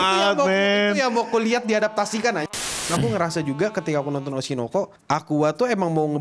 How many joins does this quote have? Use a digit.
1